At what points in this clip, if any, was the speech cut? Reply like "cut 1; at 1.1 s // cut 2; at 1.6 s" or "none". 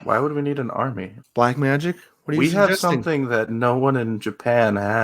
cut 1; at 1.1 s